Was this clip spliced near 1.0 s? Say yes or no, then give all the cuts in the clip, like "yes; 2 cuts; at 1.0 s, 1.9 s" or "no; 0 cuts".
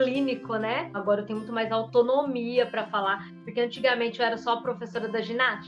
yes; 1 cut; at 1.0 s